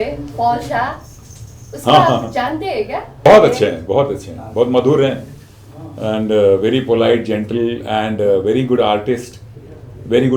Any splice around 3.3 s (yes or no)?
yes